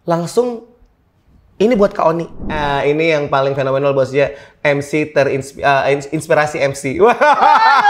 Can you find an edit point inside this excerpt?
yes; 1 cut; at 2.4 s

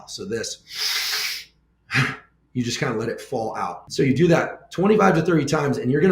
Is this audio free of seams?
no; 1 cut; at 3.8 s

